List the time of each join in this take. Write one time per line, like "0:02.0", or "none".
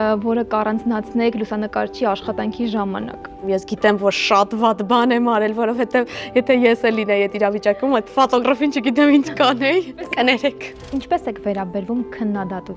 0:03.4
0:10.0
0:10.9

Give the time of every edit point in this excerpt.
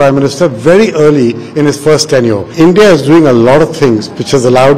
0:02.5

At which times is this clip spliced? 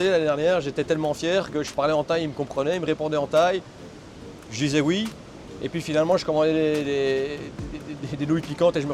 none

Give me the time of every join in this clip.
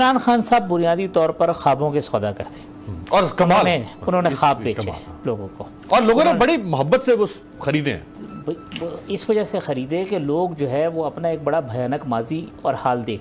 none

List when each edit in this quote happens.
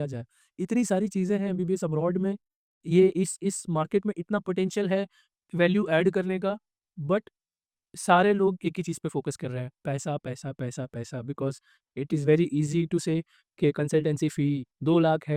none

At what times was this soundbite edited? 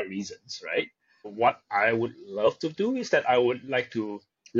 0:01.3

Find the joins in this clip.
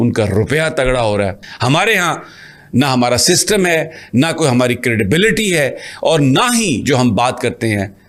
none

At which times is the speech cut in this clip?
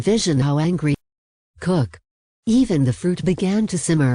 0:01.0

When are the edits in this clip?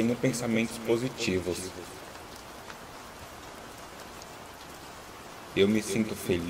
0:02.2
0:05.5

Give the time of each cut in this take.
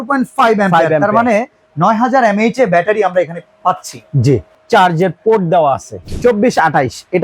0:04.5
0:06.0

